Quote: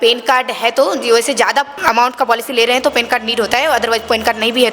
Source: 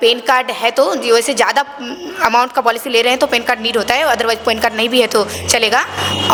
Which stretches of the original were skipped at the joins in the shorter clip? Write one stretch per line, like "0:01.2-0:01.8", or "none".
0:01.7-0:02.1